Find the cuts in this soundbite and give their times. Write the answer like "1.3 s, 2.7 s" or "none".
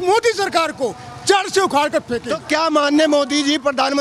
2.4 s